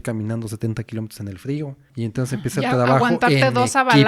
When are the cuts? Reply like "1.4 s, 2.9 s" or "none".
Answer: 1.8 s